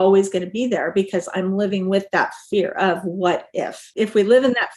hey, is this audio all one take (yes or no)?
no